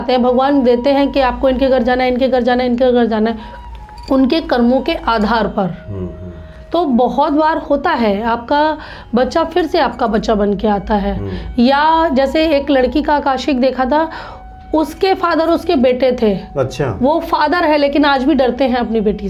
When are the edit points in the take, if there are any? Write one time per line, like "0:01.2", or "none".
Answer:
none